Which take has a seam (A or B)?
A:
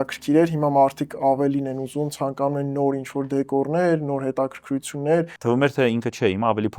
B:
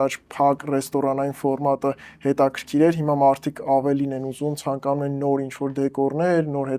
A